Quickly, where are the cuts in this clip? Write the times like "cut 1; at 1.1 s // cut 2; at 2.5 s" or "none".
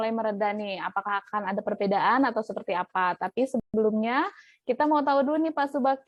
none